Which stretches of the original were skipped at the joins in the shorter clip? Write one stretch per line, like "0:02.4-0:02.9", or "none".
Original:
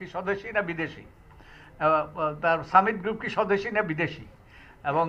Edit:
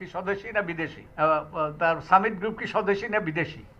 0:01.0-0:01.6